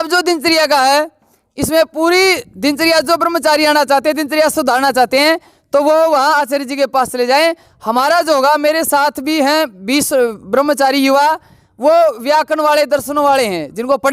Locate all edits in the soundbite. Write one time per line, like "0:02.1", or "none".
none